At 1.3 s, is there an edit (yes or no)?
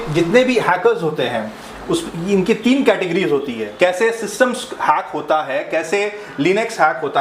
no